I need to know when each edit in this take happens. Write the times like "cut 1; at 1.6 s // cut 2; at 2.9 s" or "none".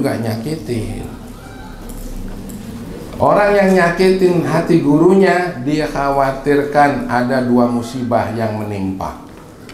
none